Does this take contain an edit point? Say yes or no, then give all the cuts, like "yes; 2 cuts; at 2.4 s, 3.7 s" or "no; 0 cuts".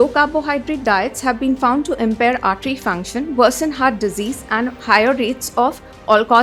no; 0 cuts